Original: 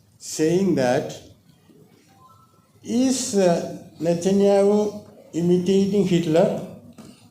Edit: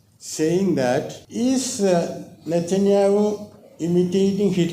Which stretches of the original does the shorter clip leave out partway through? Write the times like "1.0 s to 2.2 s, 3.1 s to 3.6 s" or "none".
1.2 s to 2.7 s

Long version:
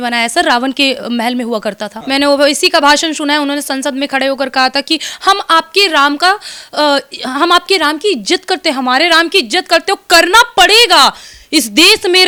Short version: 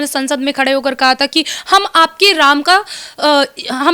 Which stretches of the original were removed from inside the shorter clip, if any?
none

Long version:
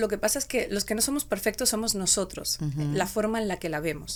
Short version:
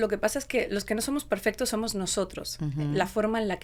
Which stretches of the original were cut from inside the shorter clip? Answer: none

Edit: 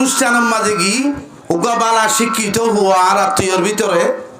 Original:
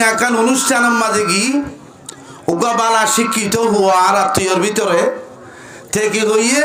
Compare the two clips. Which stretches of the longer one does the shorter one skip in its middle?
1.8 s to 2.3 s

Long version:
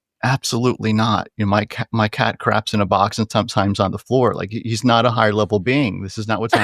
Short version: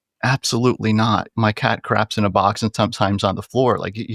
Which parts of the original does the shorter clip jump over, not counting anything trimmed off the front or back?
1.3 s to 1.8 s

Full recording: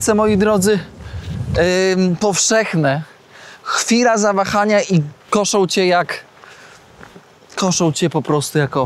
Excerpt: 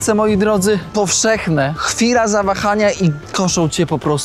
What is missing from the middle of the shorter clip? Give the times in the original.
0.9 s to 2.2 s, 3.1 s to 3.7 s, 5.1 s to 7.5 s

